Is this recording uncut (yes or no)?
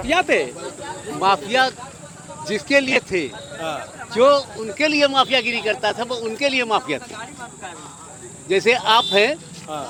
yes